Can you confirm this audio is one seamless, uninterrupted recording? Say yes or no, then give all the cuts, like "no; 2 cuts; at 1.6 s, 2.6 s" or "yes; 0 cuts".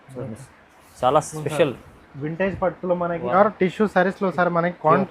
no; 1 cut; at 3.3 s